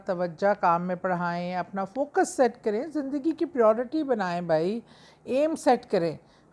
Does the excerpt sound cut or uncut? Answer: uncut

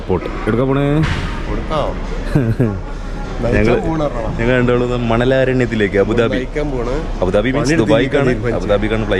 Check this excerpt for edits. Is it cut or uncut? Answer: uncut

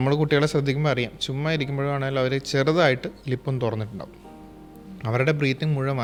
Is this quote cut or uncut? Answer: uncut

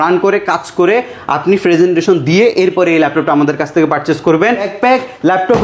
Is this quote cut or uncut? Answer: cut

